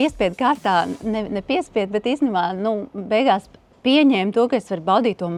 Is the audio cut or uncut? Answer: uncut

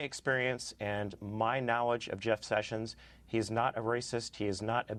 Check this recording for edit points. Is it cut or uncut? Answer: uncut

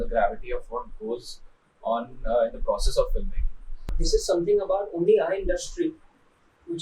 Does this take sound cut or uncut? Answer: cut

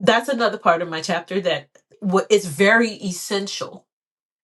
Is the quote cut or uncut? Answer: cut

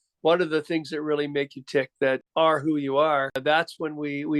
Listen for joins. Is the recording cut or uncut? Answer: cut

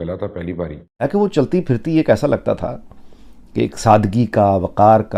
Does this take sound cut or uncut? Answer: cut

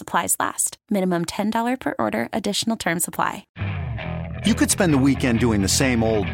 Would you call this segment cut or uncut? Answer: cut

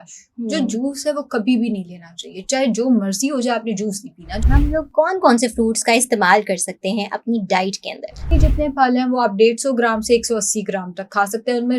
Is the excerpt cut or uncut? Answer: cut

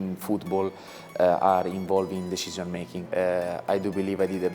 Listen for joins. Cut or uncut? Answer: cut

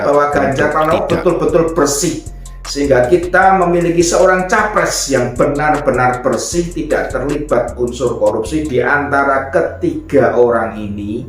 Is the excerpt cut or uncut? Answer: cut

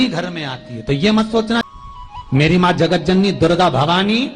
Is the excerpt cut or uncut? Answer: cut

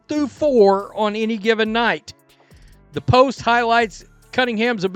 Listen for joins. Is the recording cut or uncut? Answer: uncut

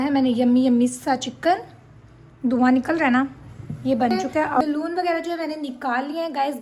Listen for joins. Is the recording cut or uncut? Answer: cut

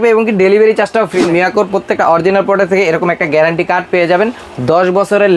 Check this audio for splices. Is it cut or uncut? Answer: cut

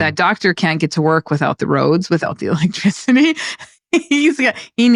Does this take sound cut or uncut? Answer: uncut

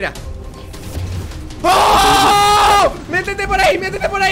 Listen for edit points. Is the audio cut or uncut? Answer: uncut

